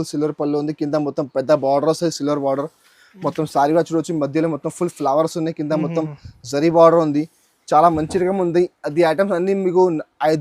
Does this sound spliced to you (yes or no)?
no